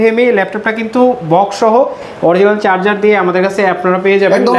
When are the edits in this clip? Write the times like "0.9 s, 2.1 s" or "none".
none